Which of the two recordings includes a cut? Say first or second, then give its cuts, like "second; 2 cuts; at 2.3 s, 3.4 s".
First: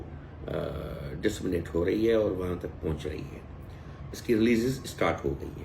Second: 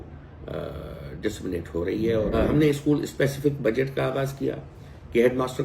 second; 1 cut; at 2.3 s